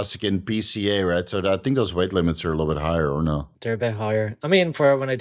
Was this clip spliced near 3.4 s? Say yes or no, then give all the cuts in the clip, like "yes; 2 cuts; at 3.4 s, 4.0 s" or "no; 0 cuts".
yes; 1 cut; at 3.4 s